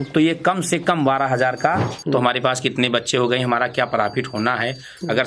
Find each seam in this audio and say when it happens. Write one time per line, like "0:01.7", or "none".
0:01.9